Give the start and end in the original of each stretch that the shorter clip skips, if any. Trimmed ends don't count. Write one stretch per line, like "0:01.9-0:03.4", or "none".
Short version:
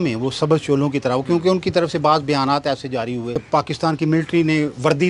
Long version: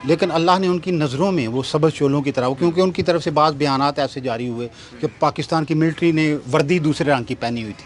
0:04.7-0:05.1